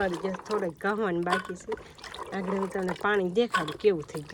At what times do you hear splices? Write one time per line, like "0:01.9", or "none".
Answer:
none